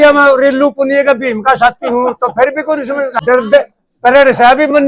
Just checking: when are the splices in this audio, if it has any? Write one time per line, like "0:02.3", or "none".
0:03.1

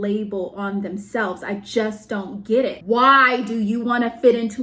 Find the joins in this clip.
0:02.8

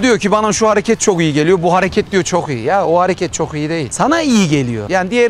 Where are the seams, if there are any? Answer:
none

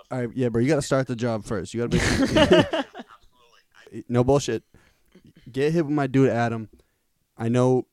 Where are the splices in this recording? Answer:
0:04.0

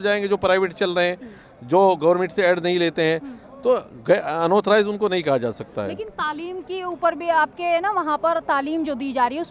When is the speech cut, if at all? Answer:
none

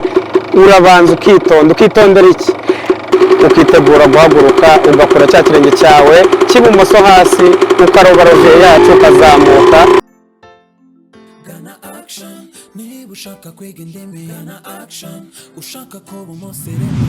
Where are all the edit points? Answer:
0:03.1
0:10.0

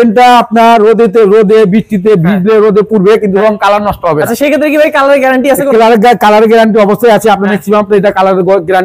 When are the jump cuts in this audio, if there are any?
none

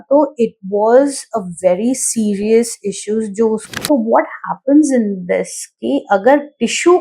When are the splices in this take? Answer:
0:03.7

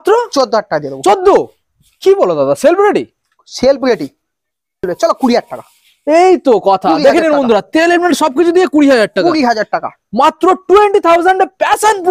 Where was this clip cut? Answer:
0:04.9

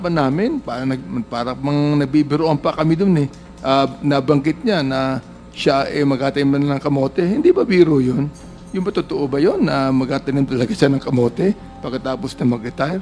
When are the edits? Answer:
none

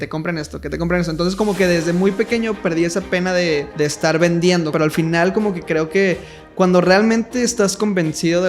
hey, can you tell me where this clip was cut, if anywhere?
0:03.7
0:04.7

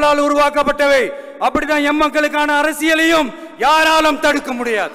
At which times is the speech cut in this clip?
none

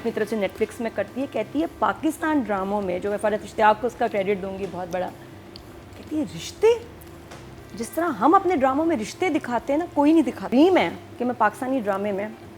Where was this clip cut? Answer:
0:10.5

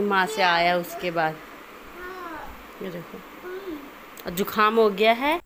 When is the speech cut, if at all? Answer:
none

